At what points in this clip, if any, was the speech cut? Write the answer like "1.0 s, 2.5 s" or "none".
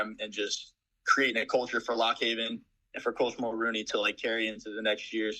none